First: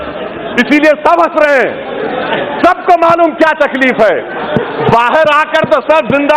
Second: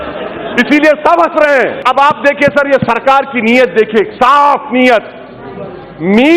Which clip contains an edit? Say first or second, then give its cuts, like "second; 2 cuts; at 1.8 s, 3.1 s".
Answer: second; 1 cut; at 1.8 s